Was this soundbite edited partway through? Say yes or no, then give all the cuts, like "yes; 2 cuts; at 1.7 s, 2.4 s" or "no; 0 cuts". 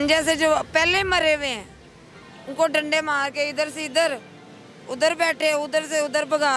no; 0 cuts